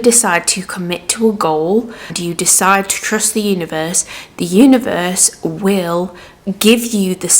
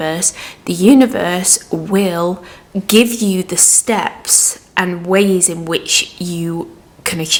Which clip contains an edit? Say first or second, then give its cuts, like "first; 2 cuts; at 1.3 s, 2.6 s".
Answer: first; 1 cut; at 2.0 s